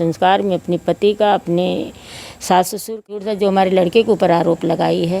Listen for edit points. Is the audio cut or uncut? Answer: cut